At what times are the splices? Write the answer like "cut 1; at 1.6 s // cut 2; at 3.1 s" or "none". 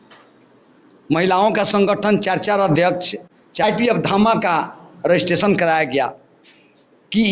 cut 1; at 3.6 s